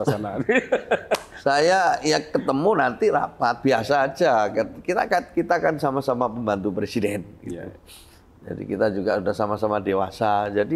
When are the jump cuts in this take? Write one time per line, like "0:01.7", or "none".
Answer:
none